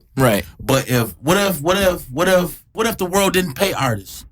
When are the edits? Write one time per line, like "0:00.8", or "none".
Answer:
0:02.7